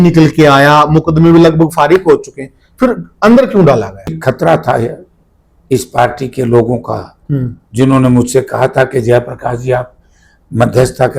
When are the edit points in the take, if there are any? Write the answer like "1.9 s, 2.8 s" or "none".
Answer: 4.2 s